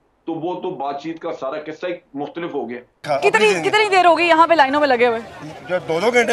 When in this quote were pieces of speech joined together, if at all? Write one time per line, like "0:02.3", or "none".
0:03.0